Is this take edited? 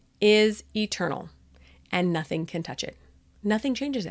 no; 0 cuts

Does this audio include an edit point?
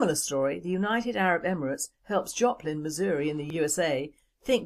no; 0 cuts

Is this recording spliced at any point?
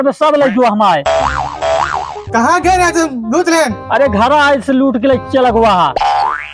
yes; 2 cuts; at 1.0 s, 2.1 s

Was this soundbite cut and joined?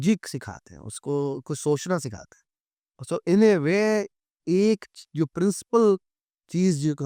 no; 0 cuts

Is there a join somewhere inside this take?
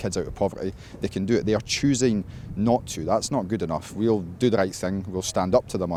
no; 0 cuts

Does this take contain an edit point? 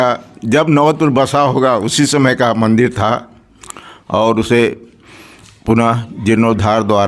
no; 0 cuts

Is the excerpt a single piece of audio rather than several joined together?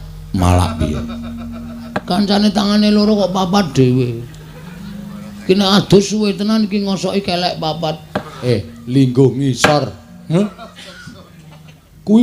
no; 2 cuts; at 2.0 s, 8.5 s

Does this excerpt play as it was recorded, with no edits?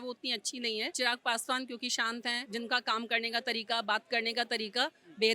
no; 2 cuts; at 0.9 s, 2.4 s

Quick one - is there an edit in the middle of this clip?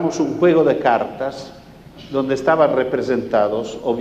yes; 1 cut; at 1.3 s

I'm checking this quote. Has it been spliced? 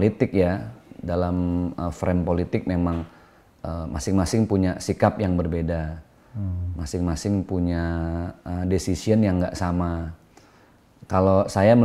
no; 0 cuts

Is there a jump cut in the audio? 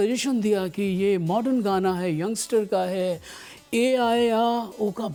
no; 0 cuts

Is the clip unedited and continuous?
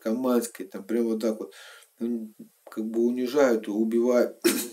yes; 0 cuts

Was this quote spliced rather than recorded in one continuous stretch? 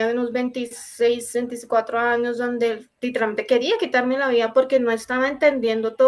no; 0 cuts

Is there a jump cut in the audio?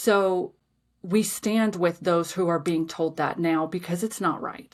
no; 0 cuts

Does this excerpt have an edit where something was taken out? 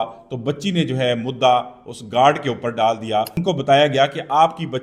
yes; 1 cut; at 3.4 s

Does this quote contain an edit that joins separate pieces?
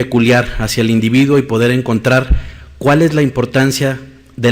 yes; 1 cut; at 0.9 s

